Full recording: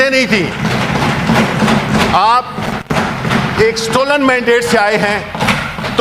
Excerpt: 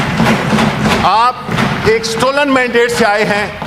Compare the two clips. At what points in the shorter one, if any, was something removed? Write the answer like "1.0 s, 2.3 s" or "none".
1.5 s